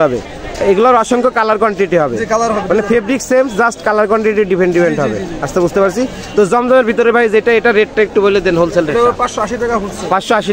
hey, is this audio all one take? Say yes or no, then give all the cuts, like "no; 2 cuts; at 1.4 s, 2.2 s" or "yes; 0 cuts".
yes; 0 cuts